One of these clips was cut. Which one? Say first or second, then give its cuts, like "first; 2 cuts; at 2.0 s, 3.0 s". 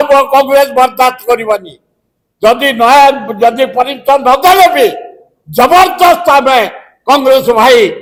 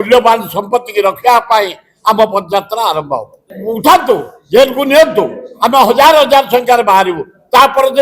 second; 1 cut; at 3.5 s